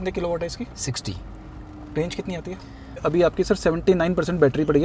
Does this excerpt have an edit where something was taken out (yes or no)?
yes